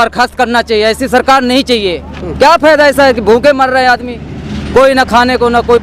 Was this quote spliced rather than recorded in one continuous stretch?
no; 0 cuts

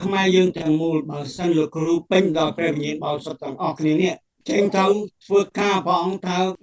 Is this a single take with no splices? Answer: no; 1 cut; at 4.3 s

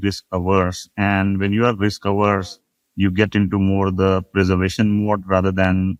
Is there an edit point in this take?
no; 0 cuts

